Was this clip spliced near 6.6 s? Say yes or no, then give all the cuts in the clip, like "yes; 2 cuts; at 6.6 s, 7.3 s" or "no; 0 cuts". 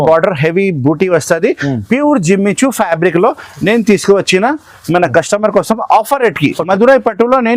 yes; 1 cut; at 6.6 s